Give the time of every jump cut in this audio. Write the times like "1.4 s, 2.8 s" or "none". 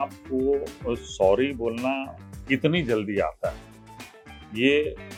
none